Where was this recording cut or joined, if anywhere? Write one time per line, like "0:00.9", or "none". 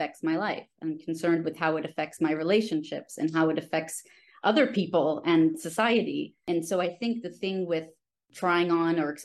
0:06.4
0:08.3